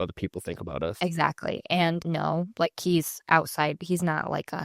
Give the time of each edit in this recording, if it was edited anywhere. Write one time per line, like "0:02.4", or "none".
none